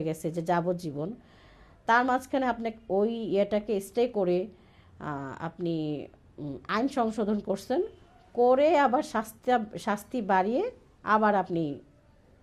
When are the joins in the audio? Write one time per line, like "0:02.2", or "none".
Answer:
none

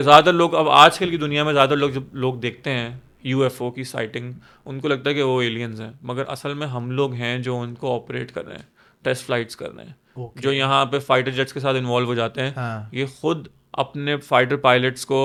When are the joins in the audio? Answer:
none

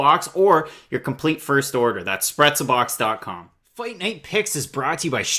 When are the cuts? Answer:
0:03.6

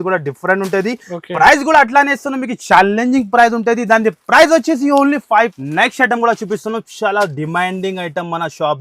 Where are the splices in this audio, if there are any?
0:05.5

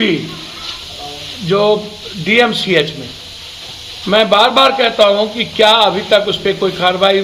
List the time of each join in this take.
none

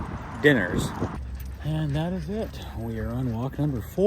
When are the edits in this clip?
0:01.2

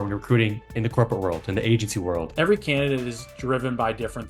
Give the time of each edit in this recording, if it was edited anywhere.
0:02.3

